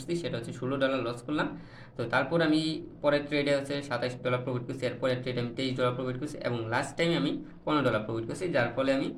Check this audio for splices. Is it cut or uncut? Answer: uncut